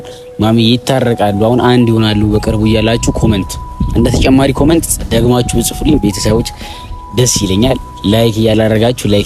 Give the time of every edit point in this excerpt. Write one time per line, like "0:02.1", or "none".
none